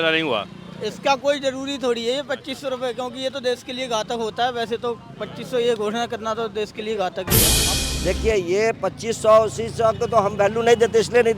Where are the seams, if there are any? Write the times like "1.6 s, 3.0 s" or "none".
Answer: 7.7 s